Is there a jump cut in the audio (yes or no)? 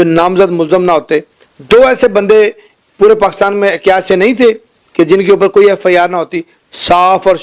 no